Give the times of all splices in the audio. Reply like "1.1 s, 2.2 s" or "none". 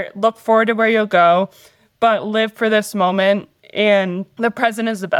4.3 s

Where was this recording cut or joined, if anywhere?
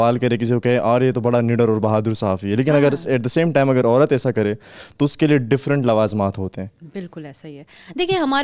none

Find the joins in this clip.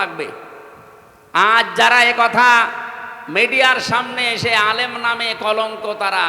none

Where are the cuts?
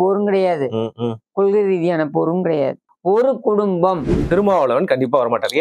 2.9 s, 4.2 s

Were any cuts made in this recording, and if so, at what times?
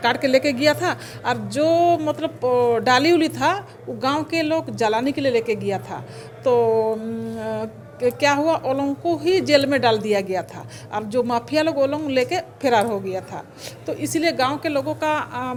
none

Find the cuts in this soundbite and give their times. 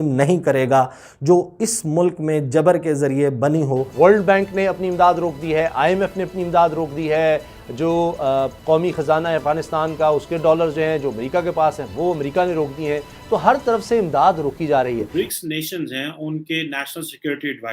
3.9 s, 15.1 s

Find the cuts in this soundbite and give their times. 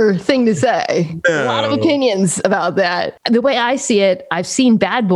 3.1 s

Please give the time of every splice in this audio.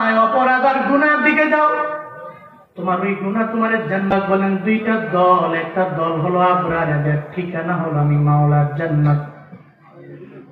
4.1 s

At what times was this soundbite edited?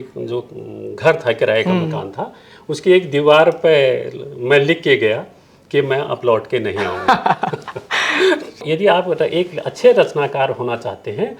8.6 s

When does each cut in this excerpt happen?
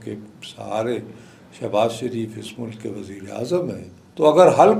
none

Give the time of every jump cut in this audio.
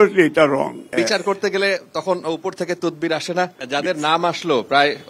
0.9 s, 3.5 s

